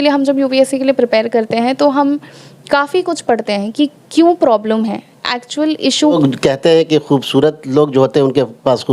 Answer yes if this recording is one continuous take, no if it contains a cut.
no